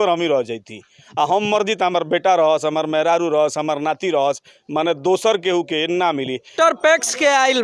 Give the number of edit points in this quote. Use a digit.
1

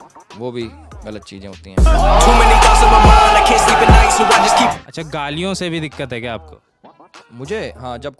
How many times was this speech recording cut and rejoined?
2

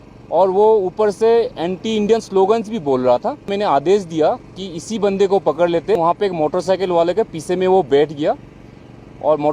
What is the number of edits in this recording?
2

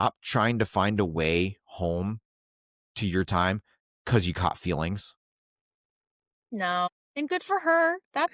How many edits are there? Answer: 1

